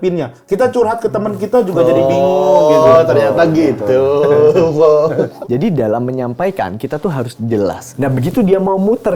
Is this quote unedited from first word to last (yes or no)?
yes